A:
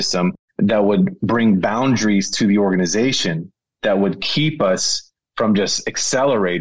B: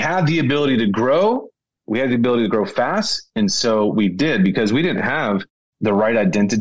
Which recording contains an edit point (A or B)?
B